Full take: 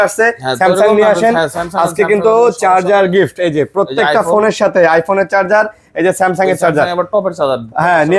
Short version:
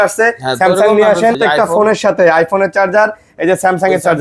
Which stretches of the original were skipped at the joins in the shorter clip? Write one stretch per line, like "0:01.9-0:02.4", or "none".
0:01.4-0:03.9